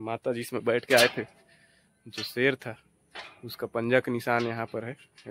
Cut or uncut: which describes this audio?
uncut